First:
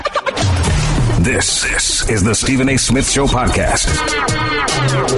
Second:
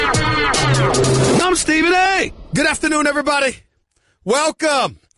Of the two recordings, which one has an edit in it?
second; 1 cut; at 2.2 s

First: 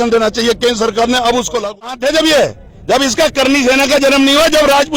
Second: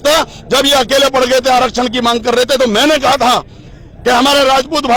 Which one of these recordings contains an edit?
first; 1 cut; at 1.9 s

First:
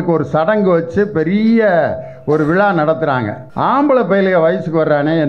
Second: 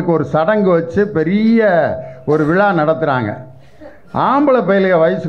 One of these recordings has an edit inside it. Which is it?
first; 1 cut; at 3.4 s

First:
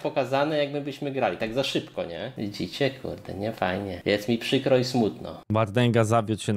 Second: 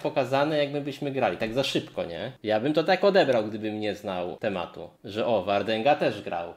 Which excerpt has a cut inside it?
first; 1 cut; at 2.3 s

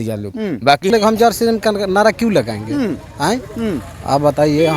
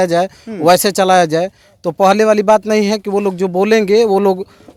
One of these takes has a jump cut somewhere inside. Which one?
first; 1 cut; at 0.9 s

